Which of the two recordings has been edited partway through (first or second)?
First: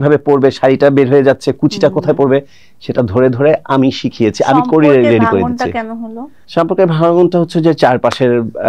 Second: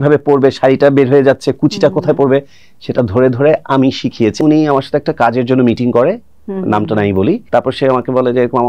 second